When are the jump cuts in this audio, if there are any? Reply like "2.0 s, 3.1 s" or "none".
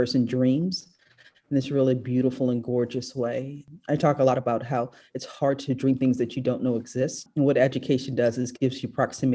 3.7 s, 7.2 s